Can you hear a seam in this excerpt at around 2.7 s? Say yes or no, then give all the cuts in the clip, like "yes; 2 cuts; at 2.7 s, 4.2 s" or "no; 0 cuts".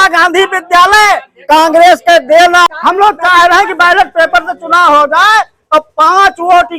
yes; 1 cut; at 2.7 s